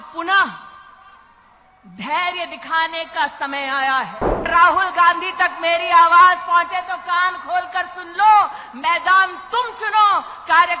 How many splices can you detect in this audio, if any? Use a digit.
1